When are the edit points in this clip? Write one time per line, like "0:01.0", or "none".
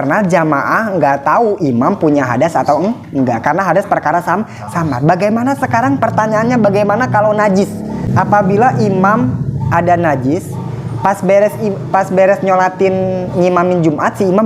0:08.1